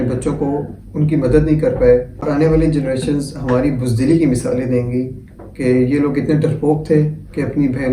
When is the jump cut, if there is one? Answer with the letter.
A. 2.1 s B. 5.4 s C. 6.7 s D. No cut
A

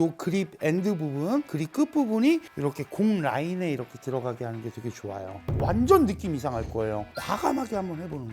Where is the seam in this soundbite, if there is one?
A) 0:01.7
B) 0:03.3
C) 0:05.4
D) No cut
C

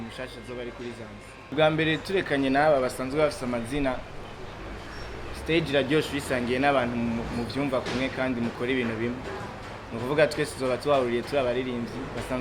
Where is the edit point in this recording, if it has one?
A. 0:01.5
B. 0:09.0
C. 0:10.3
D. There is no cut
D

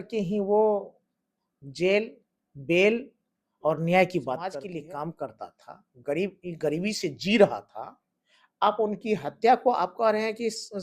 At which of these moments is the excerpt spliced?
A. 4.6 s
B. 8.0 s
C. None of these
A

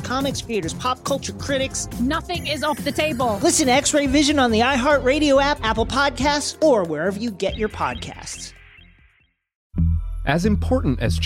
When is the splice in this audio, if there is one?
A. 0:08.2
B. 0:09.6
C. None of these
B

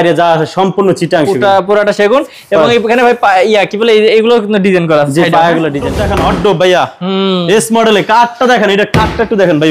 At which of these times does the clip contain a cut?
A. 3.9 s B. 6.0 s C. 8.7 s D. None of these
B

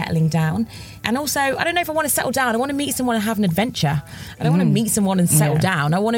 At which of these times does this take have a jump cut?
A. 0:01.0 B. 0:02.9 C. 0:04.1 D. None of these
A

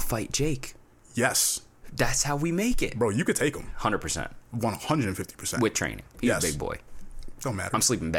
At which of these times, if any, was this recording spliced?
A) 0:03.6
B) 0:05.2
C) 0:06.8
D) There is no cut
D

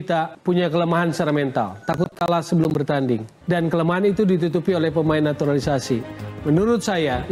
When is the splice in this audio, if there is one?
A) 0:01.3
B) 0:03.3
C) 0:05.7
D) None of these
D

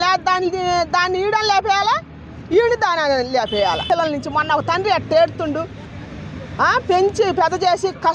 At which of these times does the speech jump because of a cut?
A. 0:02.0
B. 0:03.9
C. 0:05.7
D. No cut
B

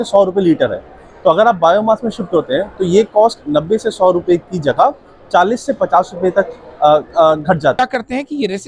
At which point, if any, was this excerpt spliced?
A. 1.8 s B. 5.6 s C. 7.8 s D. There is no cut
C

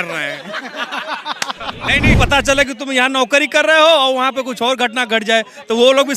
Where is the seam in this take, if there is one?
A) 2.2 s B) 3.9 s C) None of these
A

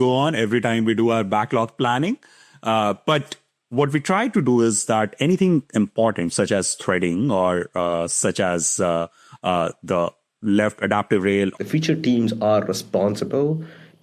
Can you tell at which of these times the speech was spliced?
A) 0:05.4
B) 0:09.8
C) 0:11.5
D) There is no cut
C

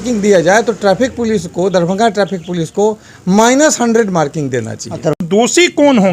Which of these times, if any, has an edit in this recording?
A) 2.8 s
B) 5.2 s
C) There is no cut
B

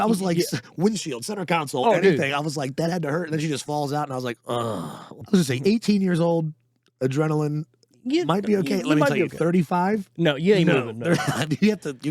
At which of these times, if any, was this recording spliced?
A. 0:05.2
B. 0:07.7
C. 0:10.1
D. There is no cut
A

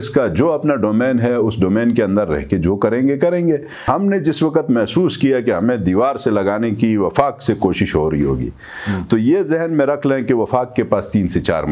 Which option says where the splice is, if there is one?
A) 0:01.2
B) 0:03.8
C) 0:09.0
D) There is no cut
B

